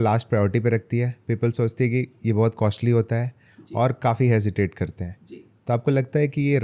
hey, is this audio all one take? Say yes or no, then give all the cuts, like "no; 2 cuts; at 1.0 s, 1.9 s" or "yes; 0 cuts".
yes; 0 cuts